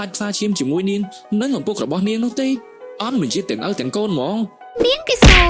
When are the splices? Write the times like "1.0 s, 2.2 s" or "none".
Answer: 4.6 s